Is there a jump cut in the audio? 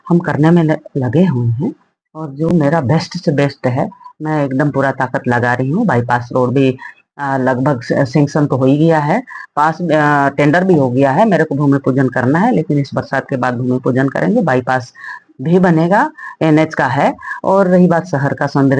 no; 0 cuts

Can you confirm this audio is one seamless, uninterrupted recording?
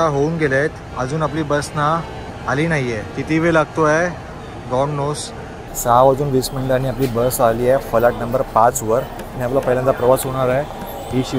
no; 3 cuts; at 0.8 s, 3.1 s, 5.7 s

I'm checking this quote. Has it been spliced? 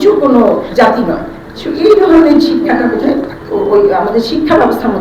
no; 0 cuts

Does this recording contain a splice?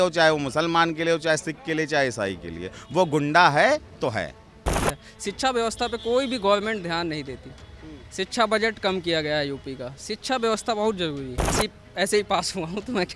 yes; 2 cuts; at 5.0 s, 11.6 s

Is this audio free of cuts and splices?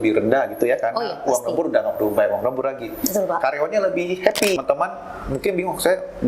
no; 1 cut; at 4.6 s

